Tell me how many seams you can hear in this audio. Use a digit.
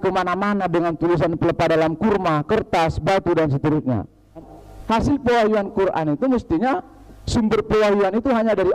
1